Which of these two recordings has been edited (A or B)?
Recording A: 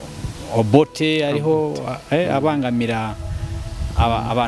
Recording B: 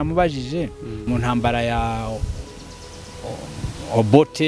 B